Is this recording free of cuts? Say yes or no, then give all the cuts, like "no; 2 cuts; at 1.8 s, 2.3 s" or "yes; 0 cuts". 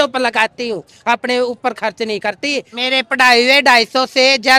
no; 1 cut; at 2.7 s